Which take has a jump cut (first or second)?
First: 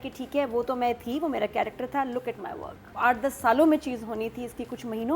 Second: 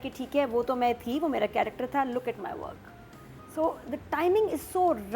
first